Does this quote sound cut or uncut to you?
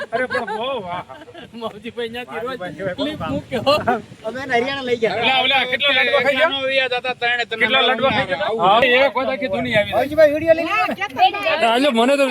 cut